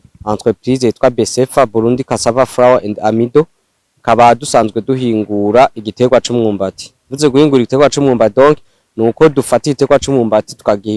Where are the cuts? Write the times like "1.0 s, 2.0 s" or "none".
none